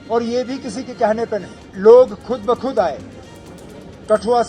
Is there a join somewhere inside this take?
yes; 1 cut; at 1.7 s

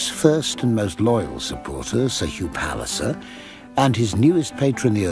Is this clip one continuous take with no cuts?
yes; 0 cuts

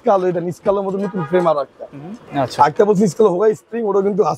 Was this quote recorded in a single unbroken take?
no; 1 cut; at 2.3 s

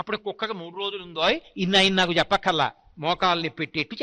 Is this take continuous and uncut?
yes; 0 cuts

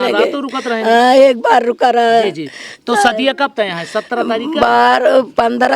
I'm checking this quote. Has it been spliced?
no; 0 cuts

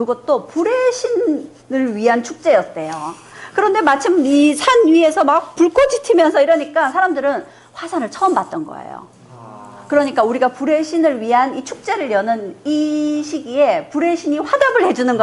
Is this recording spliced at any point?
no; 0 cuts

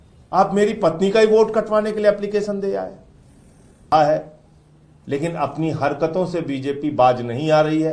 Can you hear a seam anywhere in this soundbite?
yes; 1 cut; at 3.9 s

